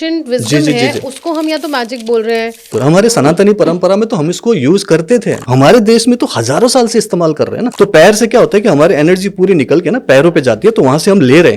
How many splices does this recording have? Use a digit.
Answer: 3